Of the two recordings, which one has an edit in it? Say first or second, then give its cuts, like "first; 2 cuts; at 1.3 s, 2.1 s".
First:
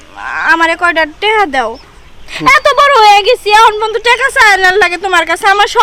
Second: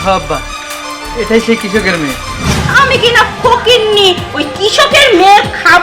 second; 1 cut; at 2.5 s